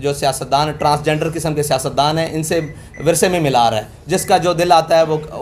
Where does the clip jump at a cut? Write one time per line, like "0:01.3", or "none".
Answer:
none